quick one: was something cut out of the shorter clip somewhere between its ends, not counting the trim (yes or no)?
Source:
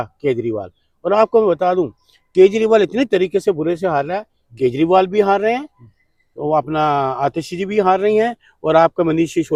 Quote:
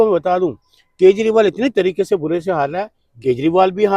no